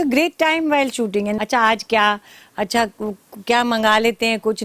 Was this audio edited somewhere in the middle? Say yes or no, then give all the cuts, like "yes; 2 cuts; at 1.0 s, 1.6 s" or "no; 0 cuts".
yes; 1 cut; at 1.4 s